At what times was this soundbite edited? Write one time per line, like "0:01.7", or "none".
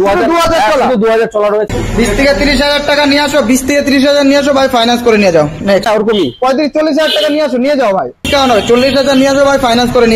0:01.7
0:05.9
0:08.3